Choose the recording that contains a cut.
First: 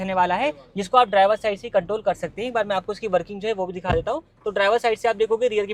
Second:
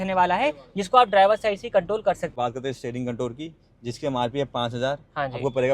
second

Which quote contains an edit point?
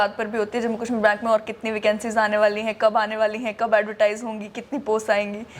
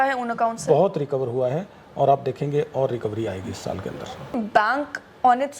second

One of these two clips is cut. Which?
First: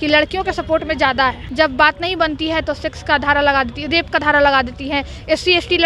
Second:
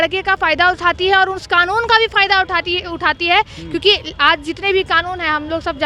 first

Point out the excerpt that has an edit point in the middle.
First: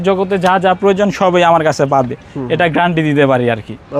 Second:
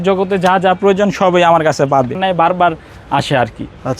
second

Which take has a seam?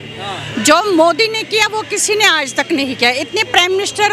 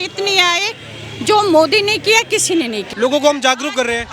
second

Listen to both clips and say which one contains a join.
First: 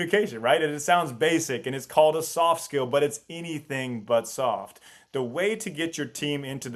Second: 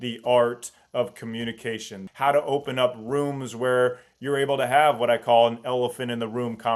second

